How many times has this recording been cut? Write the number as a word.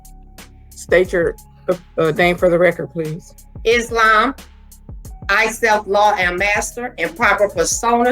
one